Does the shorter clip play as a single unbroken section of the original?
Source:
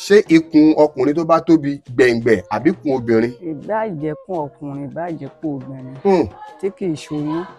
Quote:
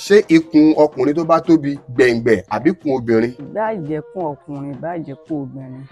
no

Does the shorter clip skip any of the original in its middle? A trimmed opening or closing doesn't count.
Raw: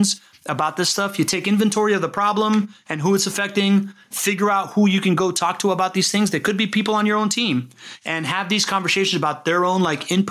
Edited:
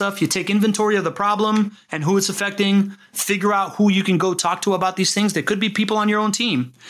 no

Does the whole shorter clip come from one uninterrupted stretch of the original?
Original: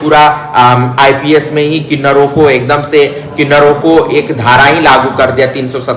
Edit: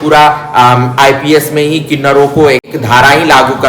no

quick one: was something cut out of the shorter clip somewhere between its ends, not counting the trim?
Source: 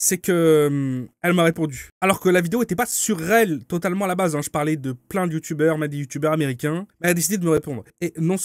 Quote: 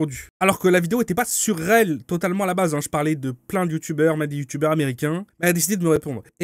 no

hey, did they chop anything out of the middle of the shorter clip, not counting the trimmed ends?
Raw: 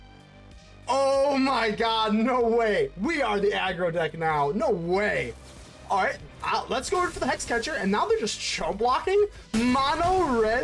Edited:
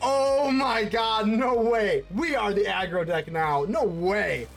no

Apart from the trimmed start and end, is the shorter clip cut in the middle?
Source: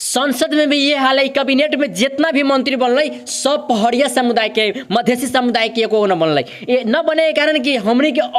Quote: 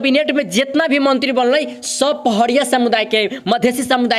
no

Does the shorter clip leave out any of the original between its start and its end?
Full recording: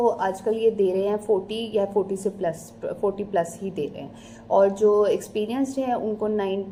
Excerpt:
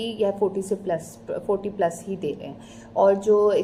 no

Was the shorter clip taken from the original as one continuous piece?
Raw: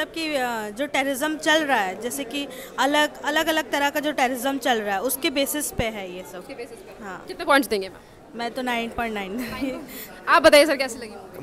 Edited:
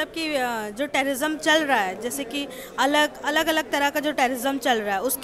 yes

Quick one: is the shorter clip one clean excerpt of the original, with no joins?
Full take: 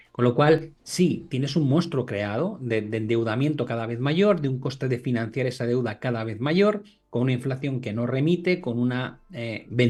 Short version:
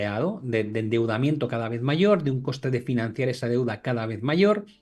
yes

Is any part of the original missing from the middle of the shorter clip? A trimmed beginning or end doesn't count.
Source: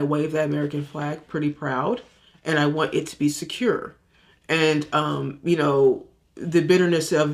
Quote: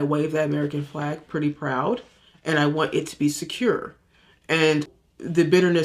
yes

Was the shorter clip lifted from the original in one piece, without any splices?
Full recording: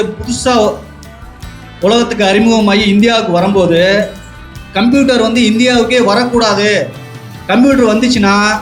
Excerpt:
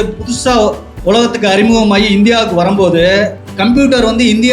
no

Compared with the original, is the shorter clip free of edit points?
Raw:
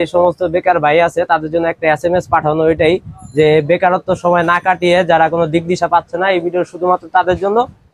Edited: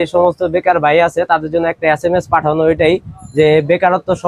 yes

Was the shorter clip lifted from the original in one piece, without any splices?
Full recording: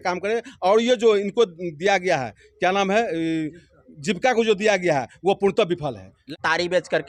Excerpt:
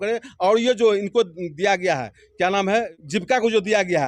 no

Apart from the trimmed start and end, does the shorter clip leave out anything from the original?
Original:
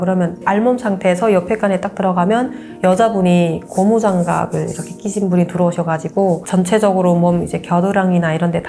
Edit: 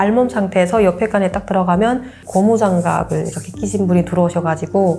yes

